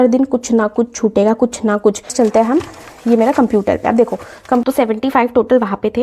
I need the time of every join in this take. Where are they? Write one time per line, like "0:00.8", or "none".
0:02.1
0:04.6